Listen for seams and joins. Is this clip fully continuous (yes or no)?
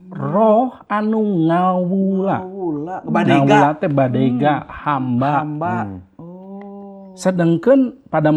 yes